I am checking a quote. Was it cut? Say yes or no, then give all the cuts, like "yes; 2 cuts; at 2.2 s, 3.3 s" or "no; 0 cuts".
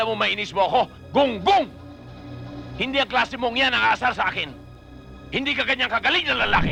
no; 0 cuts